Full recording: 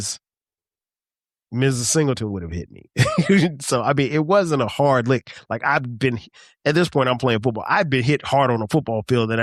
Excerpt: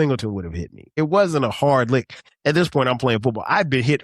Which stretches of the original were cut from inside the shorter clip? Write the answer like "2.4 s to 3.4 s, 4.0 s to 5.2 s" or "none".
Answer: 2.9 s to 4.1 s, 5.4 s to 6.4 s